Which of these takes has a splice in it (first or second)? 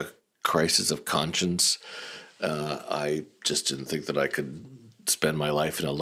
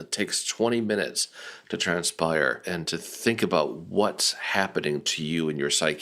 second